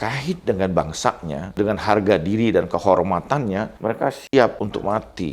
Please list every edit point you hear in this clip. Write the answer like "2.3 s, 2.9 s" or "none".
1.6 s, 3.7 s, 4.5 s